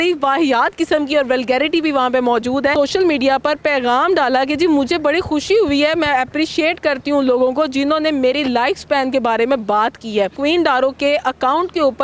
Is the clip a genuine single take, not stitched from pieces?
no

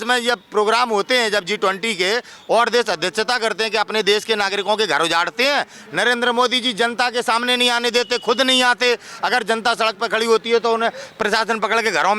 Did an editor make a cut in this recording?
no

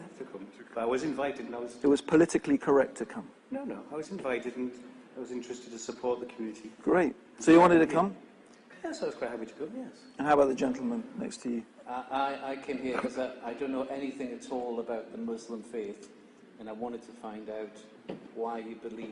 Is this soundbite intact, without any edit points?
no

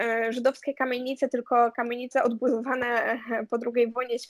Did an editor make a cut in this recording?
no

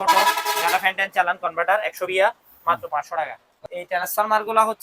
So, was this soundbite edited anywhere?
yes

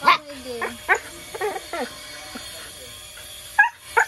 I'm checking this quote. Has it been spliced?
no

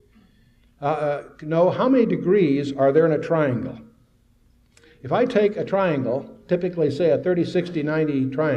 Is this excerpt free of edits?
no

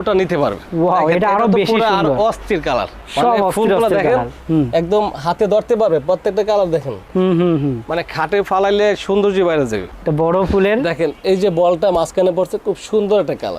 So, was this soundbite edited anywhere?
yes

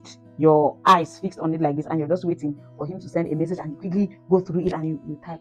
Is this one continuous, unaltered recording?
yes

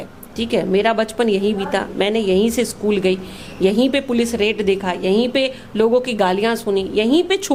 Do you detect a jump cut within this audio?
no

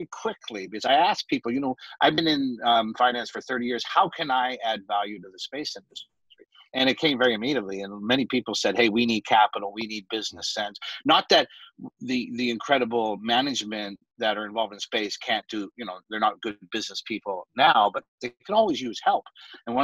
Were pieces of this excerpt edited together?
no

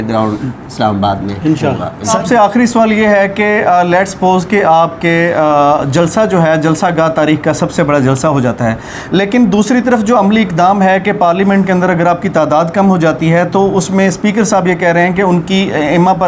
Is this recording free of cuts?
no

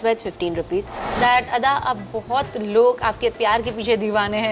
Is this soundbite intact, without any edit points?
no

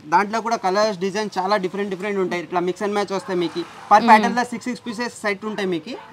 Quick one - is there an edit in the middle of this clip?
no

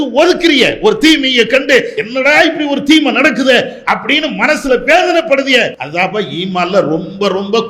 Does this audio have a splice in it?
yes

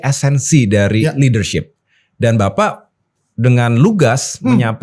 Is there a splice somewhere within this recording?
no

